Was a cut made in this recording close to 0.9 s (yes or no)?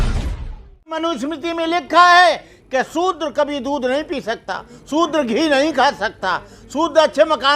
yes